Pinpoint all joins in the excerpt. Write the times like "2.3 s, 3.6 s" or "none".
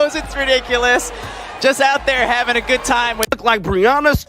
3.3 s